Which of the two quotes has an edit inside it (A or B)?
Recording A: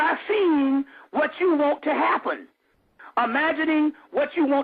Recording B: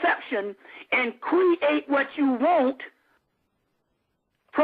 B